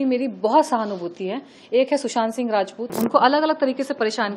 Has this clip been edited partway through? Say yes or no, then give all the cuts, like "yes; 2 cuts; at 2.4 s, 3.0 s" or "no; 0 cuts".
yes; 1 cut; at 2.8 s